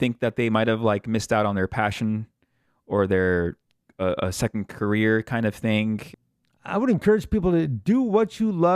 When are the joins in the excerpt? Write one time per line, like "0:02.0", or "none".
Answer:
0:06.1